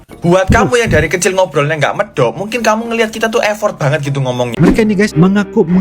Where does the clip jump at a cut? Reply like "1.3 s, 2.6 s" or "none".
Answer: 4.5 s